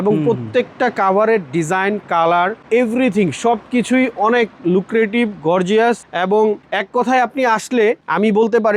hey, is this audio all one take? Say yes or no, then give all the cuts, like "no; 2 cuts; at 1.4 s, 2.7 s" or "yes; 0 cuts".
yes; 0 cuts